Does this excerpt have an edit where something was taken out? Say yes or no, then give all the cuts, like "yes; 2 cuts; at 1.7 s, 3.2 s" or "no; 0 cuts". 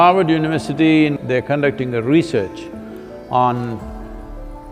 yes; 1 cut; at 1.2 s